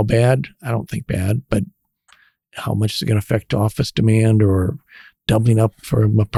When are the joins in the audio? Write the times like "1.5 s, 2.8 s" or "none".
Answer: none